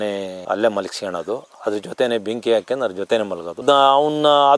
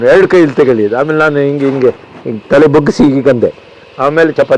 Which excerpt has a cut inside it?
first; 1 cut; at 3.6 s

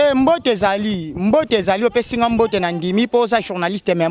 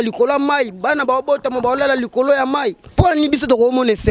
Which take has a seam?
second; 1 cut; at 2.8 s

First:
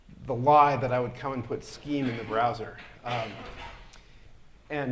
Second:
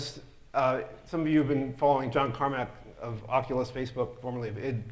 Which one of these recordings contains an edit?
first; 1 cut; at 1.2 s

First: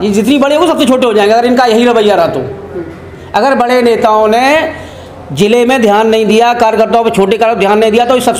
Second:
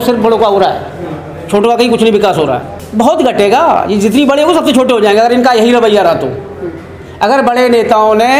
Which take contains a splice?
second; 1 cut; at 2.8 s

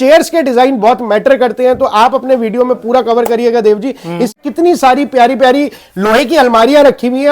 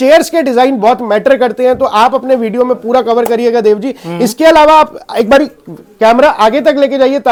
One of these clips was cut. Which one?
first; 1 cut; at 4.4 s

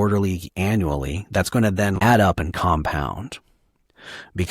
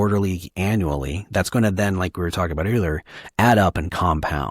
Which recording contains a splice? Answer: first; 1 cut; at 1.9 s

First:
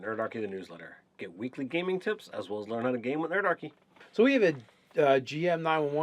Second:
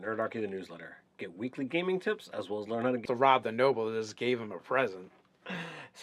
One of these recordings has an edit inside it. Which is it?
first; 1 cut; at 3.0 s

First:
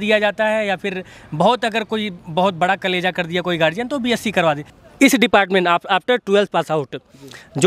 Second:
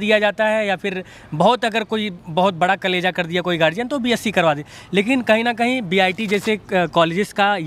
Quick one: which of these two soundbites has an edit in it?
first; 1 cut; at 4.8 s

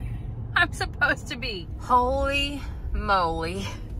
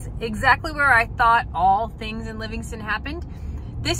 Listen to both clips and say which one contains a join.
first; 1 cut; at 1.7 s

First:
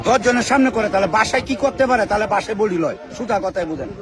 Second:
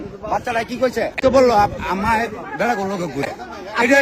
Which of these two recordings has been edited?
second; 1 cut; at 1.1 s

